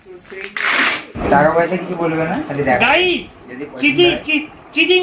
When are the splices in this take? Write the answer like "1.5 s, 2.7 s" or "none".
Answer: 1.1 s